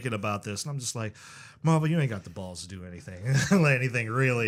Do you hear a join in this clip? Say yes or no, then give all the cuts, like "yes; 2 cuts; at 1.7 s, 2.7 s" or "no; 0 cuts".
no; 0 cuts